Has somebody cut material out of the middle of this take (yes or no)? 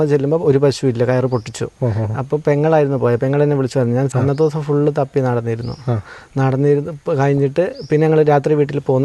yes